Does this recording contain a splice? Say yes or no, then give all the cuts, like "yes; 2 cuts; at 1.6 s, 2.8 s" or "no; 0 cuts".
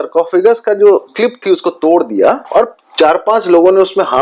yes; 2 cuts; at 1.1 s, 2.4 s